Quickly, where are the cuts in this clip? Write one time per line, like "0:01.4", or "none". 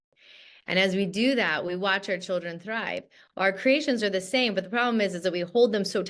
none